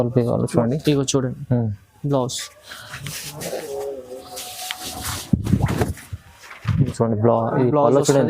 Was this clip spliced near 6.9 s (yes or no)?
yes